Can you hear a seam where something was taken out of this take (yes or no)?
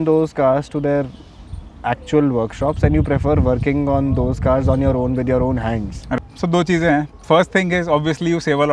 yes